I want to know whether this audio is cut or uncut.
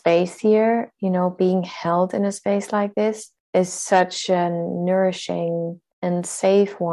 cut